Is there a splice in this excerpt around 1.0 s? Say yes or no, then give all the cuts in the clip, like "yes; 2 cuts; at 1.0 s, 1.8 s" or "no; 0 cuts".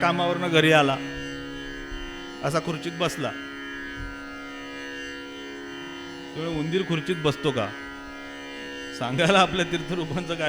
no; 0 cuts